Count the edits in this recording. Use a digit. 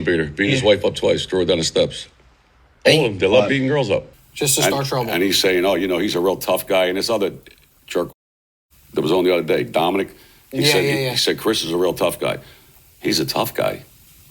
1